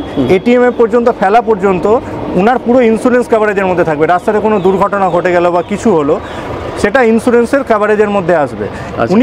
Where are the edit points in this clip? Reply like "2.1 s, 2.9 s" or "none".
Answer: none